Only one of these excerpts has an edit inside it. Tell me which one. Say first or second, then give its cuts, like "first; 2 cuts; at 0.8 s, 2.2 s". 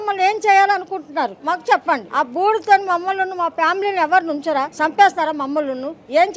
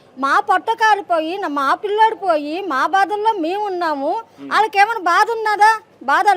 first; 3 cuts; at 1.4 s, 2.1 s, 4.7 s